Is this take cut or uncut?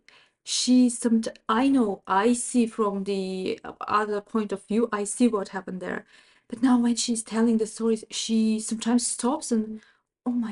uncut